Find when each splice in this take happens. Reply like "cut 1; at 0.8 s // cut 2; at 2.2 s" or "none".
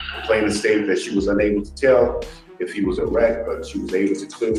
none